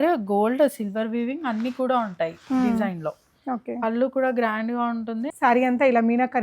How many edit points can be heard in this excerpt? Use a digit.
1